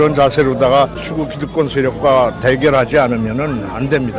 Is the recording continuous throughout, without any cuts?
no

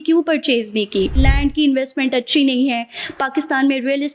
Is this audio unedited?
no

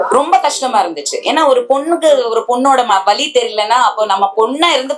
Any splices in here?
no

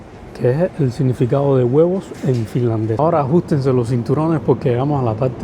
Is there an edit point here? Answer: yes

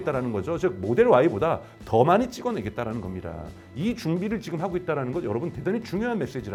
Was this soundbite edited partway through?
no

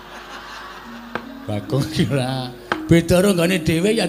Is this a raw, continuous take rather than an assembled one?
yes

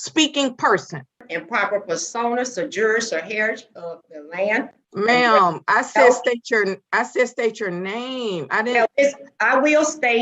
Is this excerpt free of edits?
no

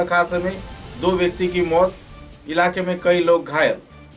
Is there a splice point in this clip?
no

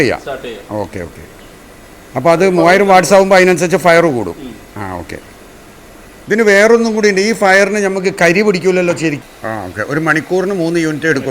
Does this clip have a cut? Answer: yes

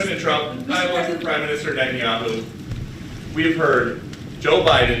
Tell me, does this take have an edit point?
yes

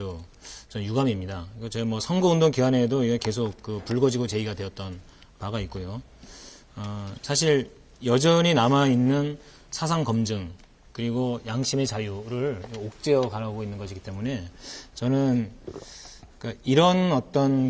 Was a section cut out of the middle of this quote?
yes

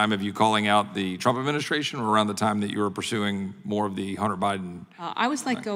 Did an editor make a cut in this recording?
no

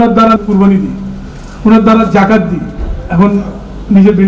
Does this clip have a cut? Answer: no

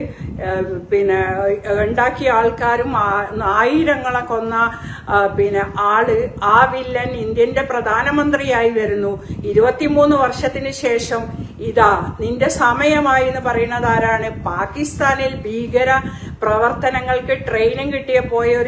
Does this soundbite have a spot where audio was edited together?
no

